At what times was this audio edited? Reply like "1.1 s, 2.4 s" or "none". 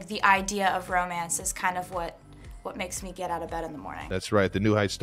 3.9 s